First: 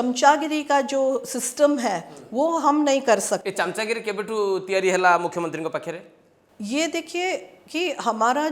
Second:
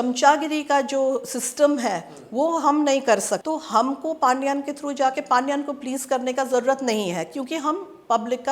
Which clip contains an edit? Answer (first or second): second